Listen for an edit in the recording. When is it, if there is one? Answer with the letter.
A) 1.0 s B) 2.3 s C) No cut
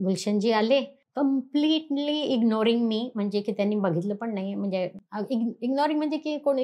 A